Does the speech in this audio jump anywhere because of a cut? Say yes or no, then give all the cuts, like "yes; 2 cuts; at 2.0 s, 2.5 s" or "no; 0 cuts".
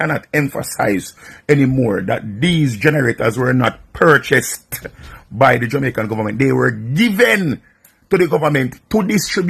no; 0 cuts